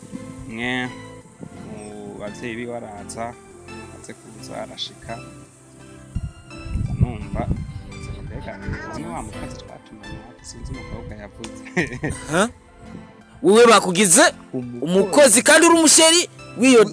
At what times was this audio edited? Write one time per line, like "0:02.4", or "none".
none